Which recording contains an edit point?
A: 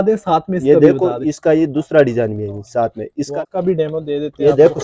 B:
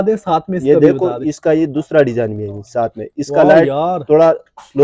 A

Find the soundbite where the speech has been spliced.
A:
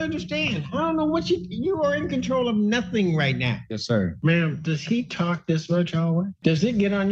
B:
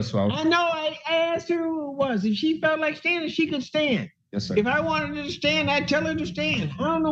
A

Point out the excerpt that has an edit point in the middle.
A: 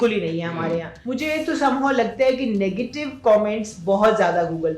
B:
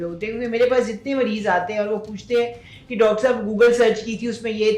A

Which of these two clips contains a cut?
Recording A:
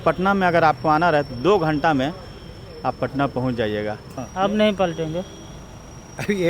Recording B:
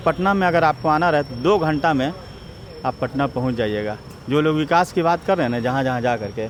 A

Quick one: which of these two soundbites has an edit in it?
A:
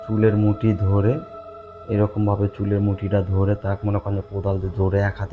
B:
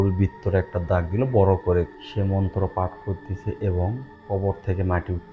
B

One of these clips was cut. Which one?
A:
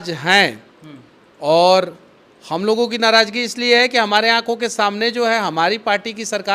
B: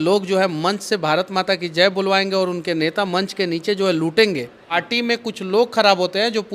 B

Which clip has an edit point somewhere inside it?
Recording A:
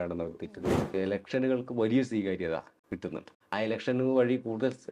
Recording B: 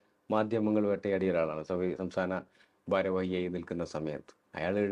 A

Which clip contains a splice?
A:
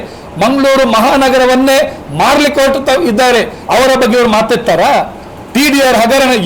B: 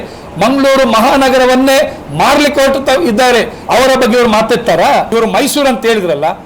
B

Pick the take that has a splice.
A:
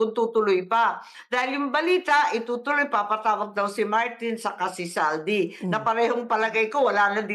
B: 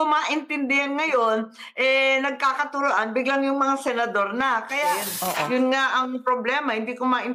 B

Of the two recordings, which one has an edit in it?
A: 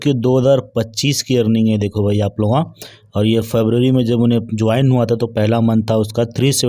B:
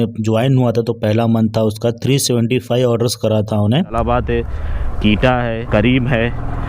B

